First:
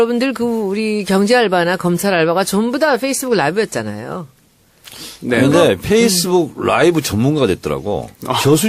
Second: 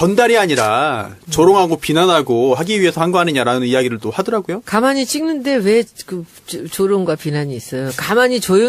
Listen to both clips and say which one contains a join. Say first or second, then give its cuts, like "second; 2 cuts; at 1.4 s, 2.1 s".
second; 1 cut; at 6.6 s